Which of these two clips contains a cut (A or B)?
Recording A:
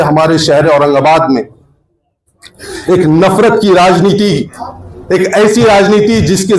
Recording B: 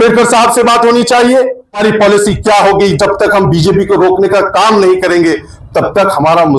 B